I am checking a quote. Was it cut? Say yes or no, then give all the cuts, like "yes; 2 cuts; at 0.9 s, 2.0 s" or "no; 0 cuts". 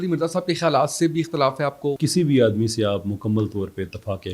yes; 1 cut; at 2.0 s